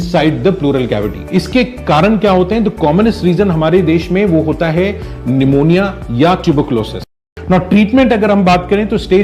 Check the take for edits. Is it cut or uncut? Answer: cut